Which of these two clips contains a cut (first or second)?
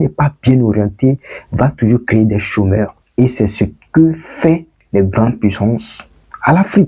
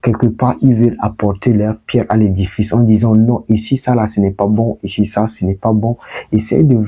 first